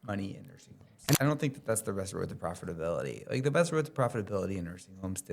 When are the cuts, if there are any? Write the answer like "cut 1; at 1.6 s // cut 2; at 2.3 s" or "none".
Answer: cut 1; at 1.1 s